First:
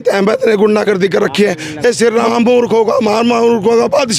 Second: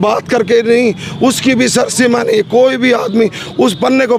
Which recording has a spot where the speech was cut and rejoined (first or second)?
first